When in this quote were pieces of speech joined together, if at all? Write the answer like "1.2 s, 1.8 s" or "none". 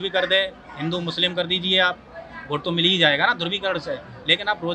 none